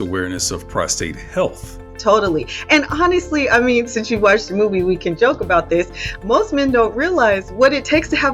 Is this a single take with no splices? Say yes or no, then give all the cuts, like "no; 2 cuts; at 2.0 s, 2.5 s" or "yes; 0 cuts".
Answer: no; 1 cut; at 1.9 s